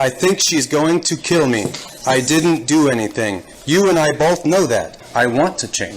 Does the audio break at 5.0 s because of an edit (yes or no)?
yes